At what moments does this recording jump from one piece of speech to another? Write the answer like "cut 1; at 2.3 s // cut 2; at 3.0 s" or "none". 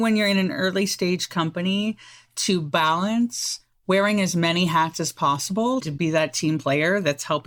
none